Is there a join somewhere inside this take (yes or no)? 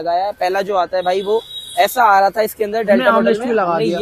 no